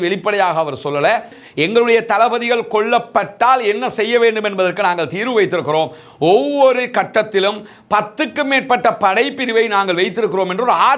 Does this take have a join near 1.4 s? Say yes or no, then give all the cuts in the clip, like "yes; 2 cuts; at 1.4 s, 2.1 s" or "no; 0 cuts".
yes; 1 cut; at 1.4 s